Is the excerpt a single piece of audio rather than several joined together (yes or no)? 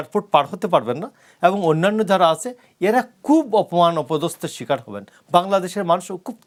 yes